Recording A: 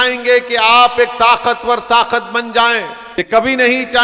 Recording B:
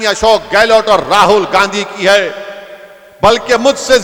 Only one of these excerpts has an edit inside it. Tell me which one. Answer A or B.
A